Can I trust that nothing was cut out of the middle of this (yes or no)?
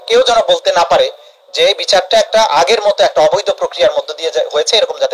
yes